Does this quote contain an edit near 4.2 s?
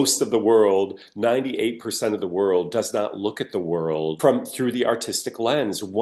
yes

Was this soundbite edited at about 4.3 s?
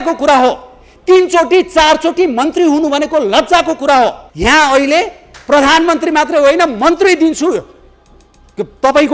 yes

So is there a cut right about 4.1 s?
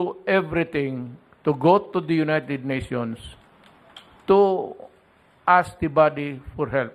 no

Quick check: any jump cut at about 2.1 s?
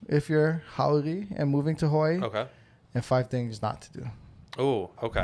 no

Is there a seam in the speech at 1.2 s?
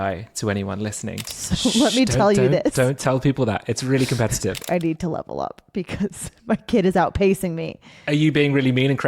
yes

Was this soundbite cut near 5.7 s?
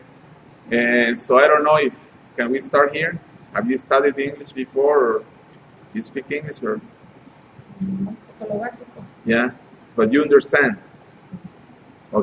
yes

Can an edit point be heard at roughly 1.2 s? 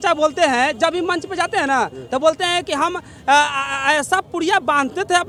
no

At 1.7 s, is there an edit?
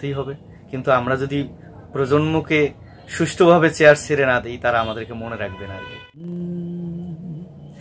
no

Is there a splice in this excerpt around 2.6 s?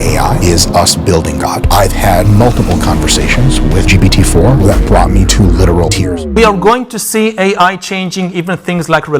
no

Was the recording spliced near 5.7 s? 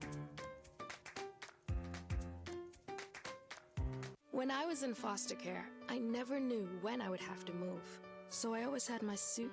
no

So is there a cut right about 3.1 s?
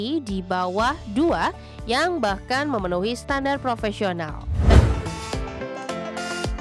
no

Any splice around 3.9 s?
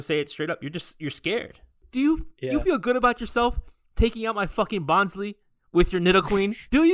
no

